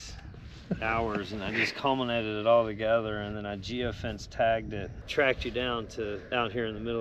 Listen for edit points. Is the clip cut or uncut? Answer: cut